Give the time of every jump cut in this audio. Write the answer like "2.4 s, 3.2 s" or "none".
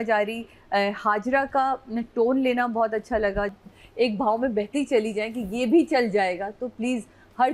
3.5 s

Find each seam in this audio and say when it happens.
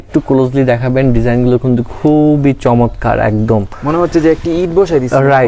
none

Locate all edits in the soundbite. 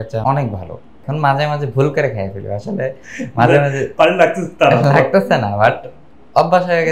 0.9 s

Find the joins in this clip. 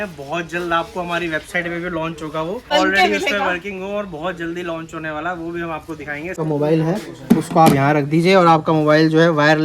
2.7 s, 6.4 s

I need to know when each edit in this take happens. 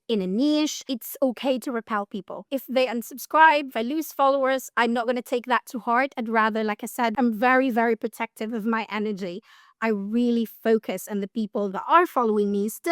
0.9 s, 2.4 s, 3.7 s, 4.7 s, 7.1 s

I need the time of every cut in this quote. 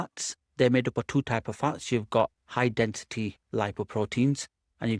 none

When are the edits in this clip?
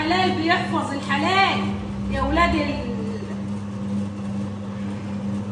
none

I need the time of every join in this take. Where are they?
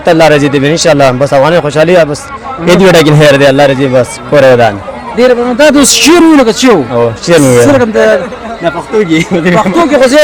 none

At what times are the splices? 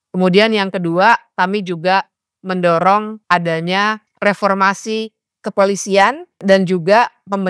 3.1 s, 4.1 s, 6.4 s

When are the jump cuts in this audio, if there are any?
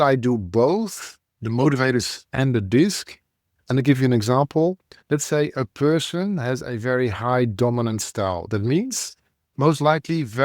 4.9 s

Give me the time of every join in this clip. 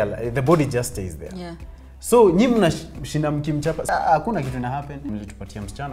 3.8 s, 5.0 s

